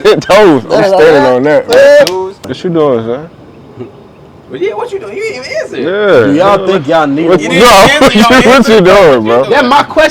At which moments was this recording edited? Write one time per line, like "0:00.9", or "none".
0:02.4

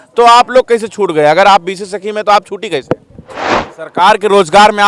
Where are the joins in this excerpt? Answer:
0:03.6

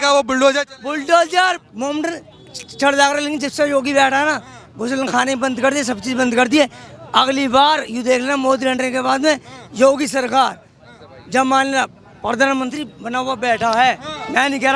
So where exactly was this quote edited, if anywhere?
0:01.6

